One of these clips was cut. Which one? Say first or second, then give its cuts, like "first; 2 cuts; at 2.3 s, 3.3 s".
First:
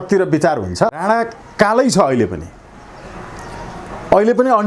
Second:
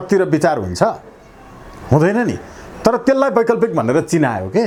first; 1 cut; at 1.0 s